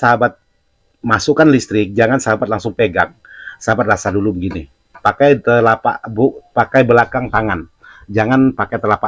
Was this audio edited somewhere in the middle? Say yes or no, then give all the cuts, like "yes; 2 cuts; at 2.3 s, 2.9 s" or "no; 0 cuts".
no; 0 cuts